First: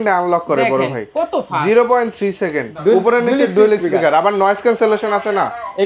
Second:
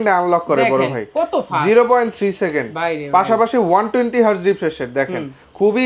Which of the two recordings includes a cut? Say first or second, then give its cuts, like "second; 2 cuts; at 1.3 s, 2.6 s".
first; 1 cut; at 2.7 s